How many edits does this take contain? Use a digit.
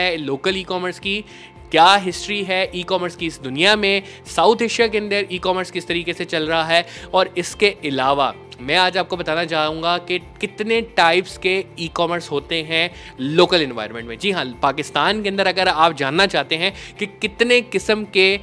0